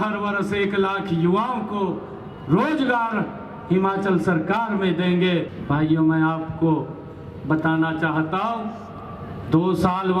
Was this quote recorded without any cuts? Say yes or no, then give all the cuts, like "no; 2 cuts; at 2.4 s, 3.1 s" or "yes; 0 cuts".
no; 1 cut; at 5.5 s